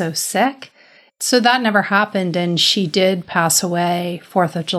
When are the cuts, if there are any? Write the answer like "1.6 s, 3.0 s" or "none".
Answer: 1.0 s